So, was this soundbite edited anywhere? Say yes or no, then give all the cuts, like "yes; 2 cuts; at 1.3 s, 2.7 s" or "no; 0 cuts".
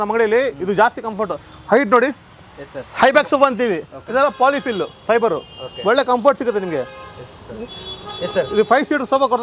no; 0 cuts